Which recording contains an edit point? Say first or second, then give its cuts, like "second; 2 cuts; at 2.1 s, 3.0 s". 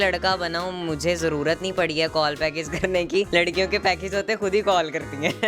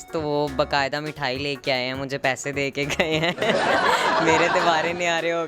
first; 1 cut; at 3.3 s